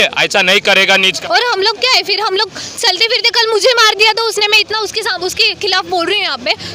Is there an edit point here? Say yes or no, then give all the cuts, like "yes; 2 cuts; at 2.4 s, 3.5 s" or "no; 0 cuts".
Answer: yes; 1 cut; at 1.0 s